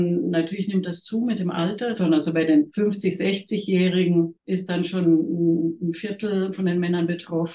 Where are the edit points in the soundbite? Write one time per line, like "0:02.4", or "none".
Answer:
0:01.9
0:02.7
0:04.4
0:06.5